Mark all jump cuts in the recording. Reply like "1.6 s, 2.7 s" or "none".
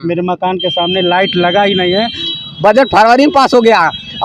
2.2 s